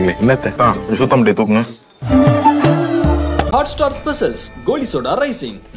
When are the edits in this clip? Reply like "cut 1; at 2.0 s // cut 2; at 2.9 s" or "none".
none